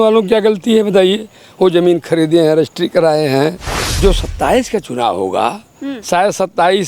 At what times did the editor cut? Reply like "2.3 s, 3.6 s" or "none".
3.8 s